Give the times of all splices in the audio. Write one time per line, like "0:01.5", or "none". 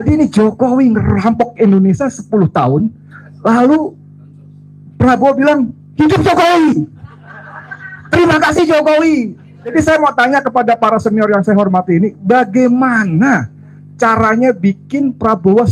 0:09.7